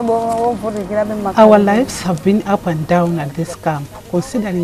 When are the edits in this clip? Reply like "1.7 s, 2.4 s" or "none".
none